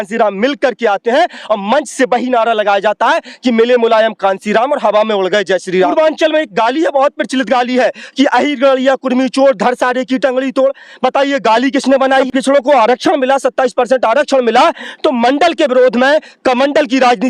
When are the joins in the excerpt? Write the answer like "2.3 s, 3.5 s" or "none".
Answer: 5.9 s, 12.2 s